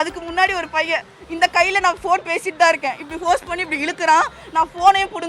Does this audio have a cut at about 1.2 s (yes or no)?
yes